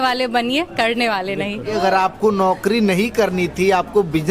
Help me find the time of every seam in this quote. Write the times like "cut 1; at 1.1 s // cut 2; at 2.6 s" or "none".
cut 1; at 1.7 s